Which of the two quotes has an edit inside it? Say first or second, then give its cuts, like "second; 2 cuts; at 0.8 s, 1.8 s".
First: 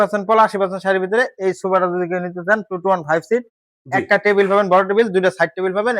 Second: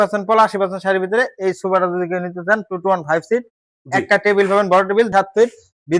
second; 1 cut; at 5.1 s